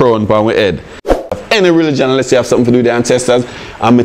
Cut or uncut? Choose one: cut